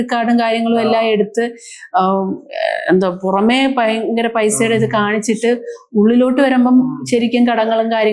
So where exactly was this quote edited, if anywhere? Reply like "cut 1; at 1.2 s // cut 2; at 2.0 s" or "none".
none